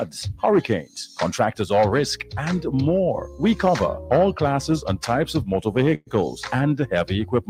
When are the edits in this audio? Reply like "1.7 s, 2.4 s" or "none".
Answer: none